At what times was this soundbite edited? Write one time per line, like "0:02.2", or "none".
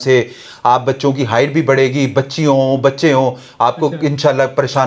none